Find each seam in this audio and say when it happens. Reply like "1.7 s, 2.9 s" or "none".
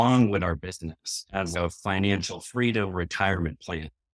1.5 s

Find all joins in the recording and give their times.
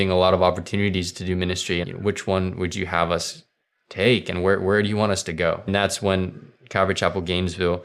1.8 s, 5.7 s

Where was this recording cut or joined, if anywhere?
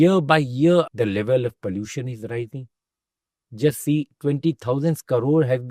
0.9 s

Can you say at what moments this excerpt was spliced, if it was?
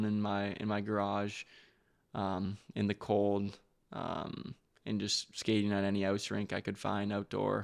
none

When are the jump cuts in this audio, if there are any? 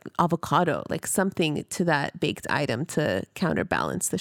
none

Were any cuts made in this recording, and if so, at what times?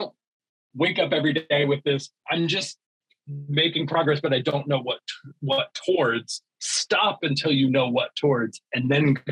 none

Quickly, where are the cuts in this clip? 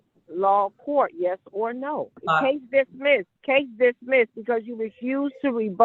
2.2 s, 3.3 s

